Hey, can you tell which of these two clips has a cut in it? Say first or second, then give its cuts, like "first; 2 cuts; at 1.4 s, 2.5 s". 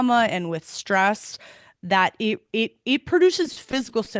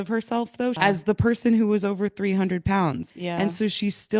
second; 2 cuts; at 0.8 s, 3.1 s